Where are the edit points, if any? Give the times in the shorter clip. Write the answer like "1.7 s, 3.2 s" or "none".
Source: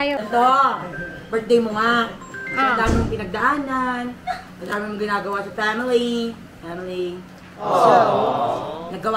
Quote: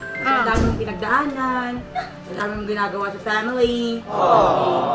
4.0 s